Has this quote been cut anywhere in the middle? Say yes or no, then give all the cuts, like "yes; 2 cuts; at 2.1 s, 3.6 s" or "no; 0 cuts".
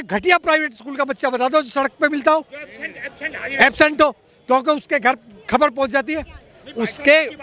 no; 0 cuts